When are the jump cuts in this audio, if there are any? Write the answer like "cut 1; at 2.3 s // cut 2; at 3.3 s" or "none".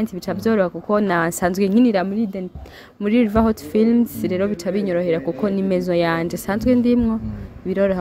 none